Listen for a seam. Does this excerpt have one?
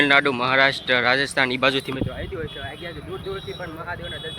no; 0 cuts

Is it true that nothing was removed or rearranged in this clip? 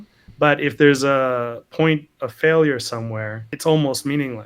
no; 1 cut; at 3.5 s

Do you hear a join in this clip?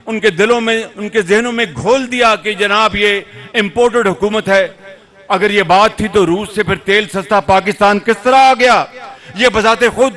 no; 0 cuts

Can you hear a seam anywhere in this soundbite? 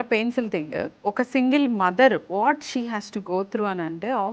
yes; 1 cut; at 0.9 s

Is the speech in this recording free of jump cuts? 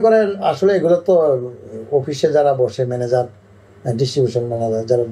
yes; 0 cuts

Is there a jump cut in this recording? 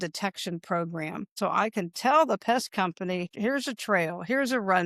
yes; 2 cuts; at 1.4 s, 3.3 s

